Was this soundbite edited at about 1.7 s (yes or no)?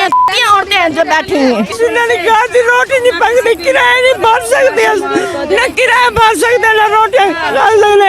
yes